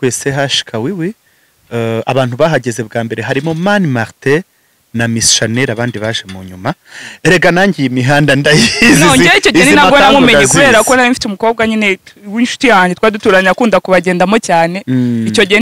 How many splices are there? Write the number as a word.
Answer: zero